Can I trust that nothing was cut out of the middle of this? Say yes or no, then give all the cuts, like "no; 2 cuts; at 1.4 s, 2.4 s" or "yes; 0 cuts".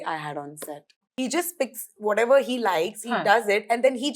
no; 1 cut; at 1.0 s